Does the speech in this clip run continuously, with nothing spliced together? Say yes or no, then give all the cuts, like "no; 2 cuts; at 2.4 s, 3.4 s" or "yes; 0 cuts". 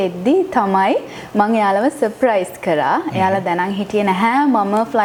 yes; 0 cuts